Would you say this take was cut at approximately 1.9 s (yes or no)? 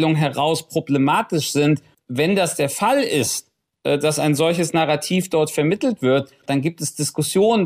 yes